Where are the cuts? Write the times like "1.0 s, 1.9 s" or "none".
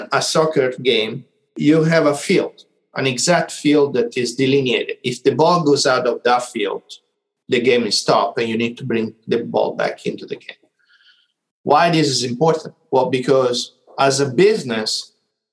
none